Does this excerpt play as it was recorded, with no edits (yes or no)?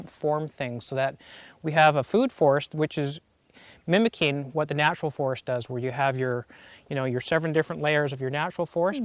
yes